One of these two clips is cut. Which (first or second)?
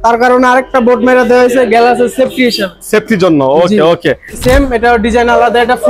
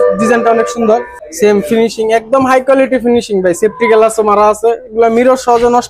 first